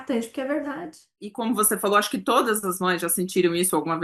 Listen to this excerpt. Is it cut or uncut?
cut